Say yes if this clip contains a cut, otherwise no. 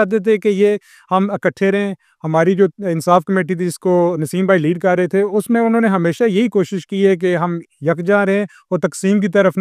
no